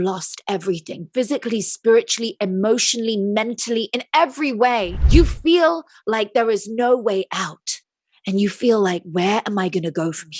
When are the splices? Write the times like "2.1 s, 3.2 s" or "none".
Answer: 5.0 s